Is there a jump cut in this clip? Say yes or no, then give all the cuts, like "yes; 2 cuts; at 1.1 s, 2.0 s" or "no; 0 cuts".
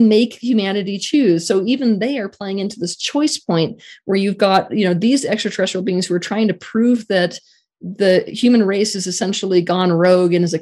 no; 0 cuts